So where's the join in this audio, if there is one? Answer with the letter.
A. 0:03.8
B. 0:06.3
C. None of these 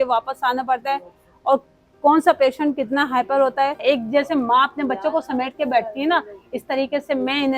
A